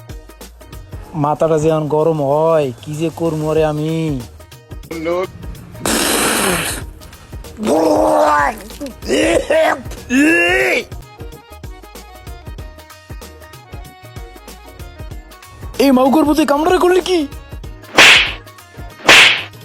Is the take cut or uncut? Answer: cut